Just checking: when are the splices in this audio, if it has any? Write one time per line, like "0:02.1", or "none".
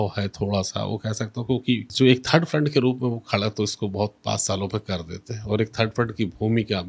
0:01.9